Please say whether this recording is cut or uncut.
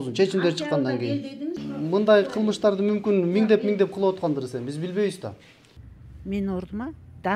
cut